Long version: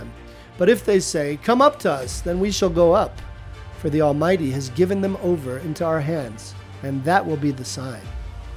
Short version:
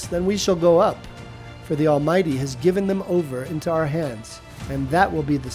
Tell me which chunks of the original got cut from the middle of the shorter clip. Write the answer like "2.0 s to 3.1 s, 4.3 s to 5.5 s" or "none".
none